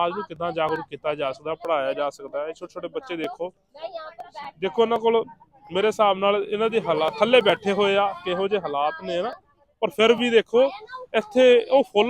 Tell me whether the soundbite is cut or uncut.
uncut